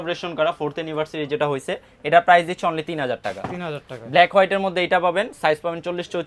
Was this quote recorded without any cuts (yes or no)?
yes